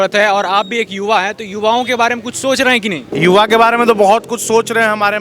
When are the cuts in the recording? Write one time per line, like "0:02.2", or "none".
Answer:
0:03.1